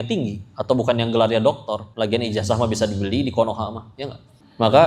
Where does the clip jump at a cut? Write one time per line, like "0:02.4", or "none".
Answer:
0:01.9